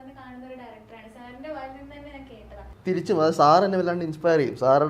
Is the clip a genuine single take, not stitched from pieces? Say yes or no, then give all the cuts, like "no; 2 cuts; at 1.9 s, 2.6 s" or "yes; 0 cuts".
no; 1 cut; at 2.7 s